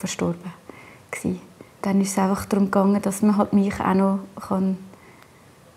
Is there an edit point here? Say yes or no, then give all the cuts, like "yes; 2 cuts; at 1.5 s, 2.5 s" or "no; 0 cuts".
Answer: yes; 1 cut; at 1.8 s